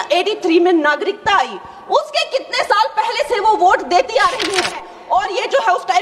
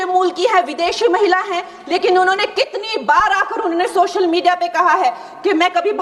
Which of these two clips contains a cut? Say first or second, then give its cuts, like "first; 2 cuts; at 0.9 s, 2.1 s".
first; 1 cut; at 4.9 s